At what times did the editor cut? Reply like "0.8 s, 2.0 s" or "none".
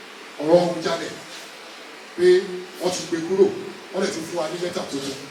none